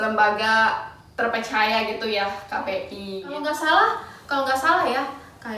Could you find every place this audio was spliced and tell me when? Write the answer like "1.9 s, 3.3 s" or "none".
3.4 s